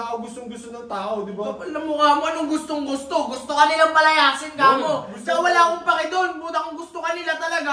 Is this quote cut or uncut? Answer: uncut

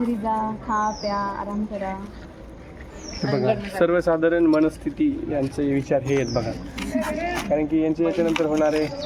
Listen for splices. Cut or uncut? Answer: uncut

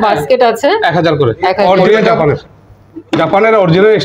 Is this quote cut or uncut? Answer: cut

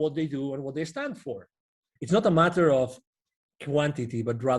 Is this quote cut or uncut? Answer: cut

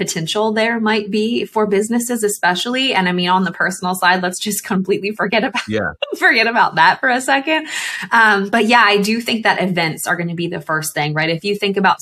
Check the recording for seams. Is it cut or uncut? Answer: uncut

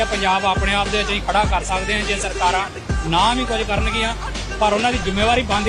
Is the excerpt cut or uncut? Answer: uncut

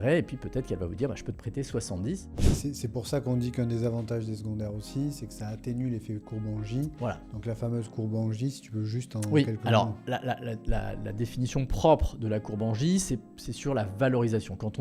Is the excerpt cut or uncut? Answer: cut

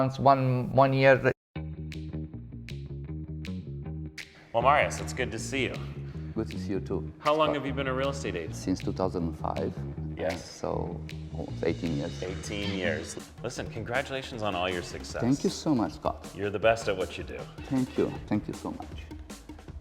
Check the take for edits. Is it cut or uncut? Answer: cut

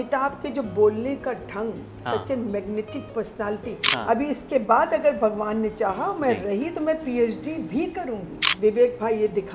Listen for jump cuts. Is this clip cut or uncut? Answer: cut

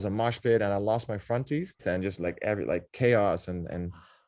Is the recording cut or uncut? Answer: cut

